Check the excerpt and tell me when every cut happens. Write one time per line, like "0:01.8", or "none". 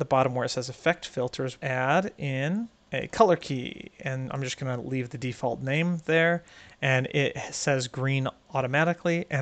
0:01.6
0:02.8